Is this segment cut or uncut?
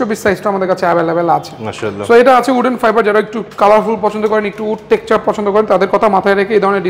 uncut